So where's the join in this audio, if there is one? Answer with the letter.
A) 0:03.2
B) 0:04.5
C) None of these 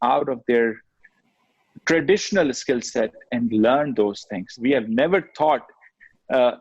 B